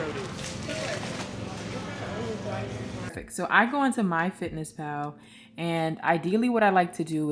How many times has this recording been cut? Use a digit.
1